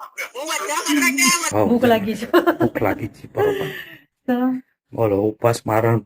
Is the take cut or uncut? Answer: cut